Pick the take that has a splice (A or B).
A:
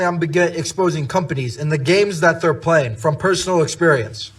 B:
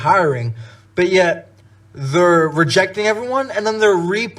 A